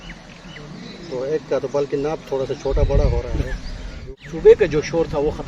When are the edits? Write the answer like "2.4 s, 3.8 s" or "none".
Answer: 4.0 s